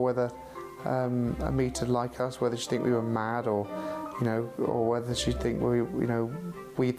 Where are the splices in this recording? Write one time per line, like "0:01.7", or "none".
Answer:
none